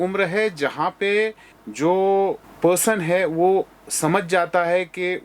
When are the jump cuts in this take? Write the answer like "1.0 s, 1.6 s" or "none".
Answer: none